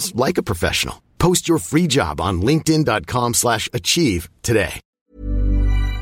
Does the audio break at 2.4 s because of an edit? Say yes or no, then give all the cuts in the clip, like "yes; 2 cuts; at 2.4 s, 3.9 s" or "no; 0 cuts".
no; 1 cut; at 4.8 s